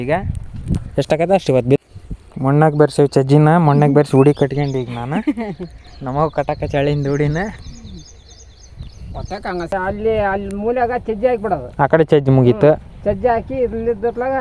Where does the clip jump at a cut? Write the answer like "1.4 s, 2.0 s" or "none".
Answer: 1.8 s, 9.7 s